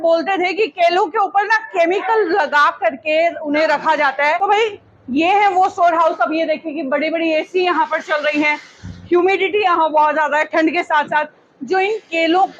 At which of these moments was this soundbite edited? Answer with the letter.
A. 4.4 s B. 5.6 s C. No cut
A